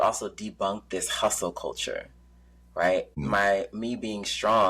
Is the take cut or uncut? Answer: cut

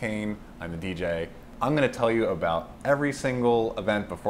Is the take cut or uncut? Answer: cut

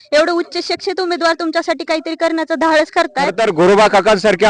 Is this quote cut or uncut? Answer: cut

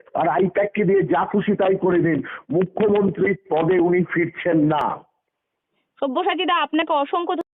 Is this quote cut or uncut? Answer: uncut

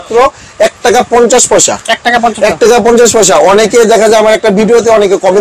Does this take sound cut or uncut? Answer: uncut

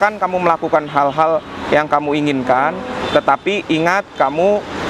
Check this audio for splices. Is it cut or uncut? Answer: uncut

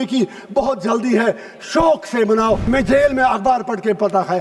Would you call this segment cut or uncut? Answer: cut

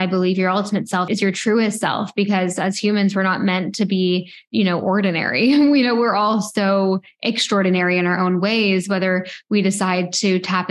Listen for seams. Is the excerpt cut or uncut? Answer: cut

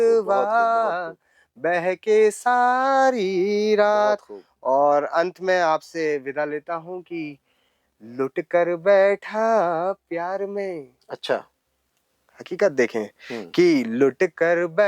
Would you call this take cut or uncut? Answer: uncut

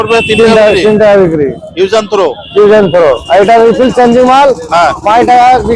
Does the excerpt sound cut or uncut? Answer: uncut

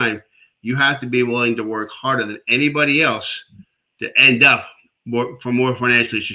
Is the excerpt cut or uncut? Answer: uncut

